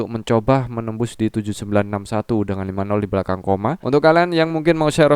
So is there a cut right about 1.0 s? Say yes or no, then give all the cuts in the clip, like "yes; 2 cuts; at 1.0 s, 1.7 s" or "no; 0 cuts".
no; 1 cut; at 3.8 s